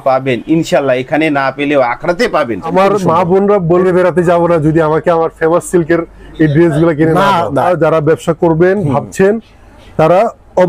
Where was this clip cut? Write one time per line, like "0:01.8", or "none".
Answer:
0:02.6
0:03.8
0:07.7